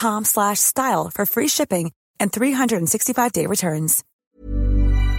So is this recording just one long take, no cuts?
no; 1 cut; at 4.0 s

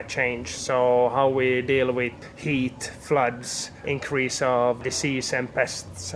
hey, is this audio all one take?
no; 3 cuts; at 2.2 s, 3.8 s, 4.8 s

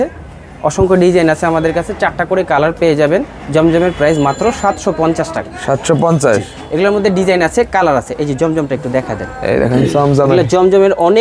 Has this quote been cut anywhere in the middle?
no; 0 cuts

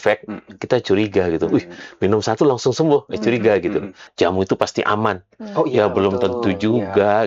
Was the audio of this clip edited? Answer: yes; 1 cut; at 4.0 s

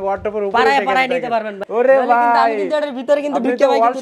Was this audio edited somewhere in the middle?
yes; 1 cut; at 1.6 s

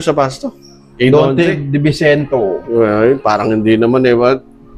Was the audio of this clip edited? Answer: no; 0 cuts

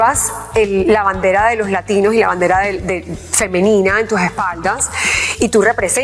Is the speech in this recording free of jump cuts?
yes; 0 cuts

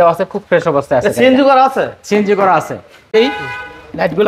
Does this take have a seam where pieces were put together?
yes; 1 cut; at 3.1 s

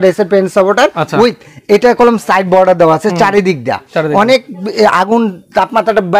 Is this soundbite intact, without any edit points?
yes; 0 cuts

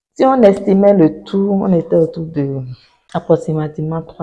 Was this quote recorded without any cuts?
no; 1 cut; at 3.3 s

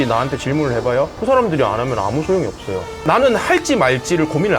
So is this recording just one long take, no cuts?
no; 1 cut; at 3.0 s

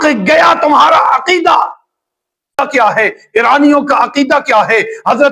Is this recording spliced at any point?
yes; 1 cut; at 2.6 s

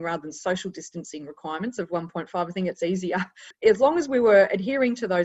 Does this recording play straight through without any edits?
no; 1 cut; at 3.4 s

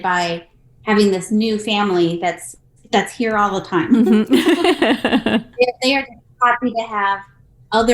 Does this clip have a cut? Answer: yes; 1 cut; at 5.5 s

